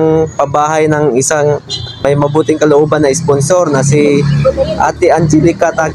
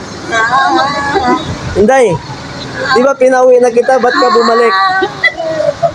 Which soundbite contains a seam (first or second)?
first